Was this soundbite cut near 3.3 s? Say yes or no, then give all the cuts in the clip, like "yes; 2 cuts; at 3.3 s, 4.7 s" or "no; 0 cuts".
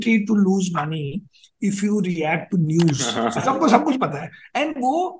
yes; 1 cut; at 3.3 s